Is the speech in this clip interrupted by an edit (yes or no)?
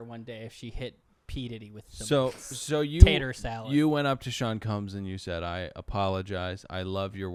no